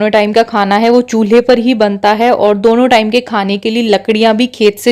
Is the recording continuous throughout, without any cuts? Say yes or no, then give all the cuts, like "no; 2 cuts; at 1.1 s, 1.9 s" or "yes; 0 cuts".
yes; 0 cuts